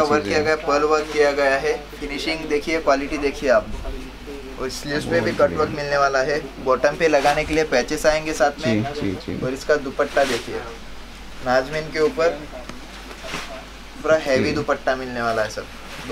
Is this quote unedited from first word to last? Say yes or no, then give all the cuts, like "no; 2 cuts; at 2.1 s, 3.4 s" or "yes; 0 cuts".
yes; 0 cuts